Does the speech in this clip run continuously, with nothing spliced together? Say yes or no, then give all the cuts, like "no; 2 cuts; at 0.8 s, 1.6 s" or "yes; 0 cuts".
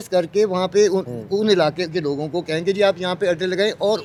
yes; 0 cuts